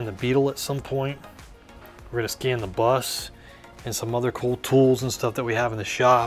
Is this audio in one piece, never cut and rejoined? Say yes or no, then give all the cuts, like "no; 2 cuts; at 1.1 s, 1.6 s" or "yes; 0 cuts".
yes; 0 cuts